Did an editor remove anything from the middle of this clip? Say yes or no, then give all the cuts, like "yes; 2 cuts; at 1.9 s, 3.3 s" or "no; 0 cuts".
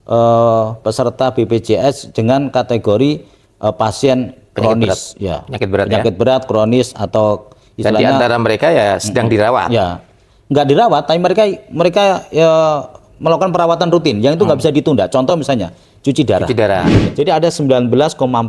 yes; 1 cut; at 16.9 s